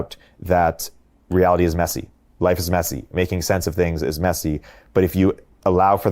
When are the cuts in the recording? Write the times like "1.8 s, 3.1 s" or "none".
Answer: none